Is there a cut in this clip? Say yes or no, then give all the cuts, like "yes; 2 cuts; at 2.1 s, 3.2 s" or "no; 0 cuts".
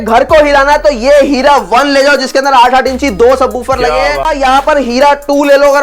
yes; 1 cut; at 4.2 s